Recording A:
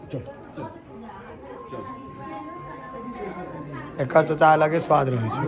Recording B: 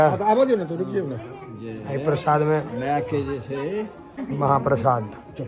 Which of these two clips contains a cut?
B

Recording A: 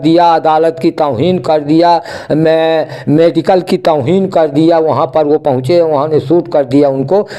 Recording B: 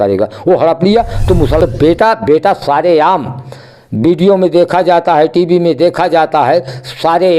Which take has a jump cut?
B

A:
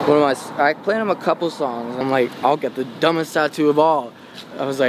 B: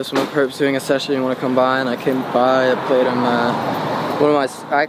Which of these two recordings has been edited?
A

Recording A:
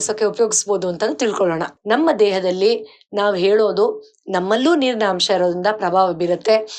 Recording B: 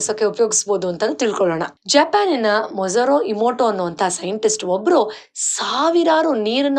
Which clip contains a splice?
A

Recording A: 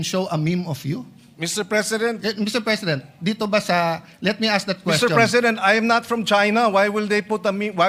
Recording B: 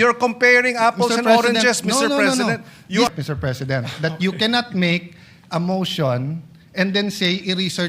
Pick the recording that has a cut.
B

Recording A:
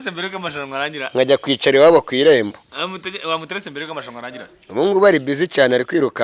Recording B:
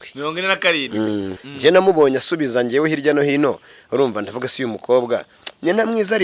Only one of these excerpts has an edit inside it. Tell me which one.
B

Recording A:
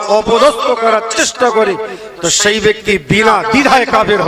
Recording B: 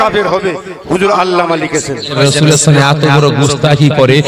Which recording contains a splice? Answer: B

